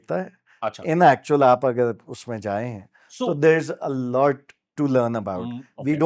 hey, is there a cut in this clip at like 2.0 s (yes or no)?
no